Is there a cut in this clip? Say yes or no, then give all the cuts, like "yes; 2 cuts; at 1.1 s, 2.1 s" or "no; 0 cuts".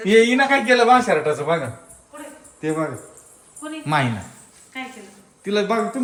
no; 0 cuts